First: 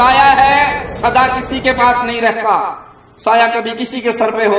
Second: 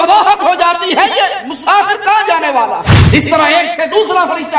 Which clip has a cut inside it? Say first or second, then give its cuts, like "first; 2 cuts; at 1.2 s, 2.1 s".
second; 1 cut; at 2.9 s